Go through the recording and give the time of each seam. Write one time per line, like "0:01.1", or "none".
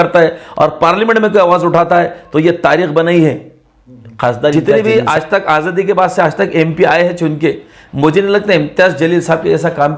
0:04.5